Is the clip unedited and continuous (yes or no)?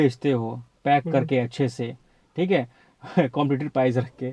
yes